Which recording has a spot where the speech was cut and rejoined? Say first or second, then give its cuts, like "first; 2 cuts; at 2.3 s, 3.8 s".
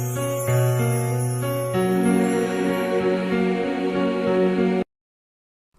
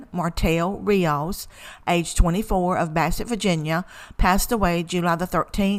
first; 1 cut; at 1.7 s